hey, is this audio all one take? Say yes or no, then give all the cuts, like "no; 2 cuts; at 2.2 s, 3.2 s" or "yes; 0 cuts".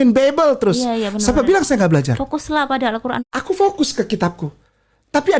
no; 1 cut; at 3.2 s